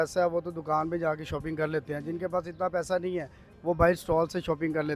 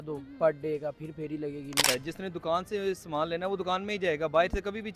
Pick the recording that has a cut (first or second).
second